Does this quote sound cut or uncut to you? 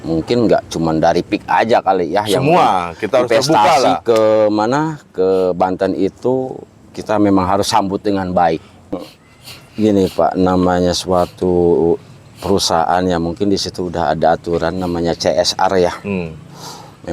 cut